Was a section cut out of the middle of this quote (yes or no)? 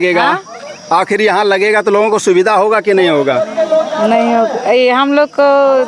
no